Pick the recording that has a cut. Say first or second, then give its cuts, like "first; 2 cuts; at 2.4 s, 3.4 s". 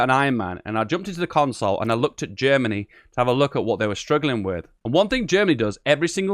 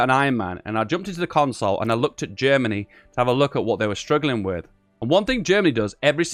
first; 1 cut; at 4.7 s